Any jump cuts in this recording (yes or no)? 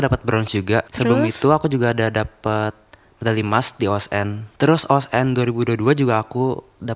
yes